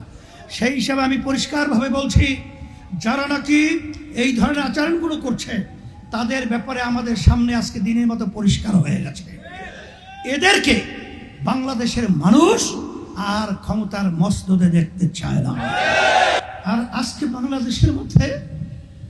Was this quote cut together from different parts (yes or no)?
yes